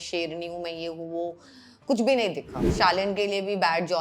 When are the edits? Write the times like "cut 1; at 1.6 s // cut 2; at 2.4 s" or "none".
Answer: cut 1; at 2.6 s